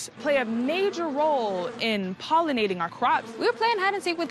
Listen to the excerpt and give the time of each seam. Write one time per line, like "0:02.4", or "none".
0:03.3